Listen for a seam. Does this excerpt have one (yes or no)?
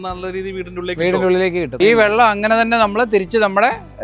yes